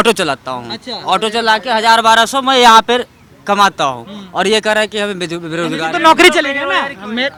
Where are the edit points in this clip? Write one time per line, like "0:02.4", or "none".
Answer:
none